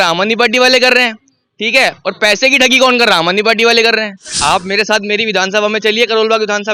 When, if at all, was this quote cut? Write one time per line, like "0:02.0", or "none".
0:04.3